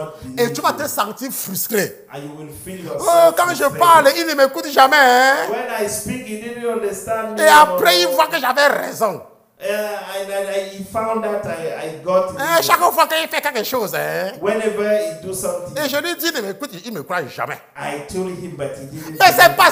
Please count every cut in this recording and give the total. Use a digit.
0